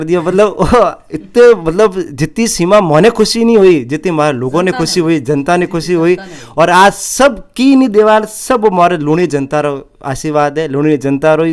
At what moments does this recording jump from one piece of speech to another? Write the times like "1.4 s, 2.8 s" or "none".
none